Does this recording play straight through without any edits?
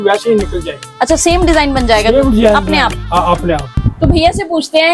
no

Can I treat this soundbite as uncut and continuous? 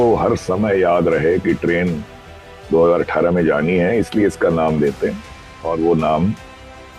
yes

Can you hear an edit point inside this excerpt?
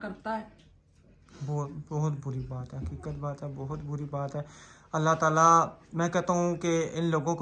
no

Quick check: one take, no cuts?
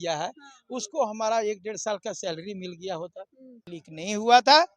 no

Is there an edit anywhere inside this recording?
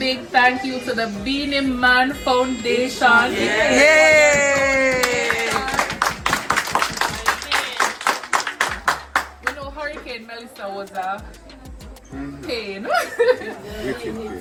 no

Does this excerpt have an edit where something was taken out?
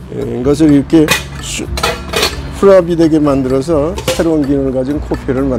no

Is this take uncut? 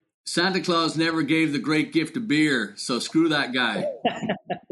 yes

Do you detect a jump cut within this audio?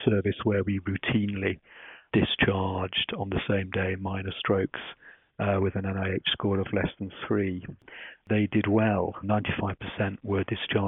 yes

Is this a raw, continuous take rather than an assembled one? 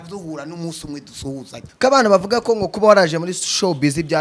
no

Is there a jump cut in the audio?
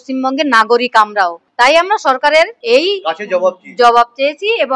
yes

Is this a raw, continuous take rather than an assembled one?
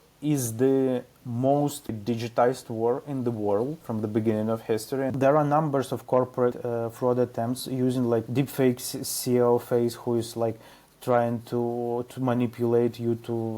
no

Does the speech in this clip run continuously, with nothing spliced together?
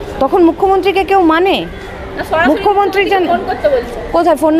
yes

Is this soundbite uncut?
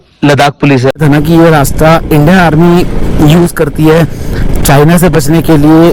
no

